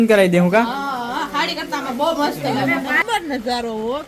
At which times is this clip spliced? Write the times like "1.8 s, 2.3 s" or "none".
2.9 s